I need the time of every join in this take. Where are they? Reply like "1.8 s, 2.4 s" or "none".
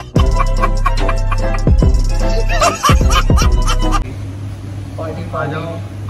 4.1 s